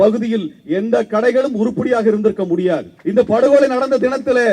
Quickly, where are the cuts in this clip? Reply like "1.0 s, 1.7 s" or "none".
2.9 s